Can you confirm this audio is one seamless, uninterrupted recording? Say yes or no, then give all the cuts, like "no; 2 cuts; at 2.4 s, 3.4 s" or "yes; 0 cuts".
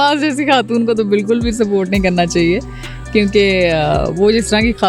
yes; 0 cuts